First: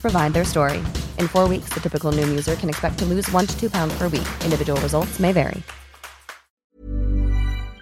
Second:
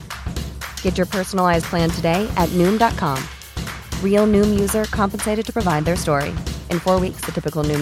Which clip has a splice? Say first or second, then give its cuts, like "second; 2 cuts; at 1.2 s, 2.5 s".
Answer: first; 1 cut; at 6.1 s